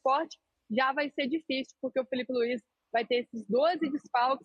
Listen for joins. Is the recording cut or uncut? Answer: uncut